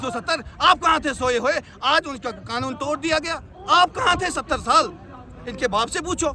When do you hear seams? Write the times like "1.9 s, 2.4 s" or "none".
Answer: none